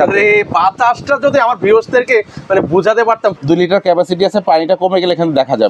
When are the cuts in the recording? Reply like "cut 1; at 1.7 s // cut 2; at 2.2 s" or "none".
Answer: cut 1; at 3.4 s